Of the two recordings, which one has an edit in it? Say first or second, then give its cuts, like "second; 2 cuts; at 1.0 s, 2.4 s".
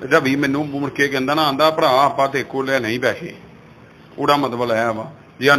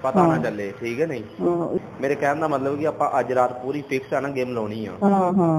second; 1 cut; at 1.8 s